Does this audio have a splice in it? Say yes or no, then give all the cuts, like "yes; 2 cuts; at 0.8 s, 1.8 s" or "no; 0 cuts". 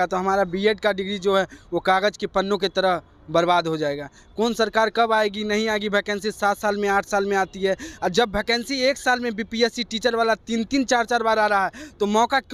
no; 0 cuts